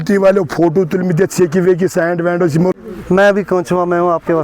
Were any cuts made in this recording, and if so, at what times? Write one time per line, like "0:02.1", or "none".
0:02.7